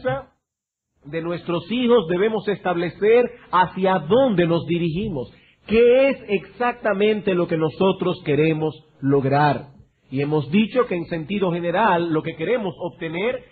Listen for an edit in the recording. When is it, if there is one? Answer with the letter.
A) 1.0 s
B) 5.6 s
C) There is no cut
B